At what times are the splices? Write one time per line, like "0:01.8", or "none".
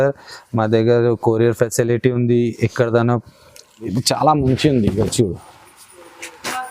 0:03.9

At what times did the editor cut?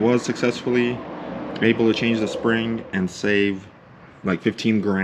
none

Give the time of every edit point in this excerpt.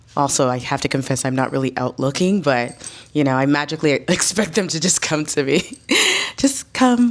none

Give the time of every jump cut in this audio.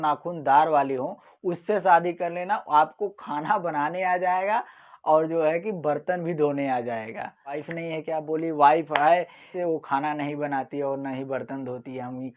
0:07.6
0:09.5

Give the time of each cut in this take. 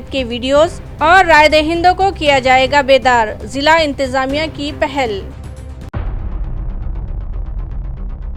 none

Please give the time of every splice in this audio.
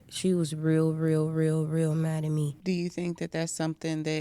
0:02.5

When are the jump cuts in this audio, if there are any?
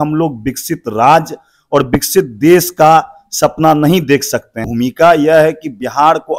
0:04.5

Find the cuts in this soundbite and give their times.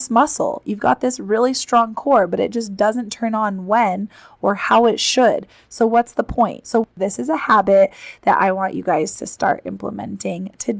0:06.7

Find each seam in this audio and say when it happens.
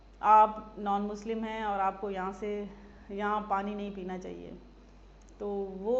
none

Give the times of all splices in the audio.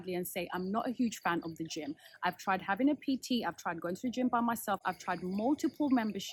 none

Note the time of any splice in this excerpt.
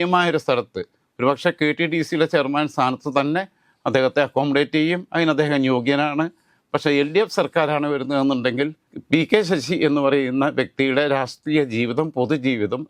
0:08.9

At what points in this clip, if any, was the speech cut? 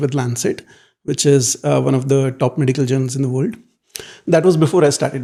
none

